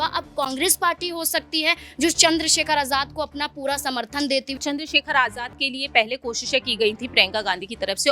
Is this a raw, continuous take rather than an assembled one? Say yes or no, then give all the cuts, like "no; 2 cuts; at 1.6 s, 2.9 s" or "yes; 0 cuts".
no; 1 cut; at 4.6 s